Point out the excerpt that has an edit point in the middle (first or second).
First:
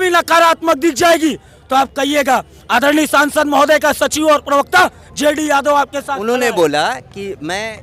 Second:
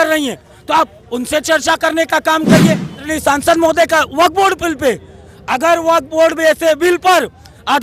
second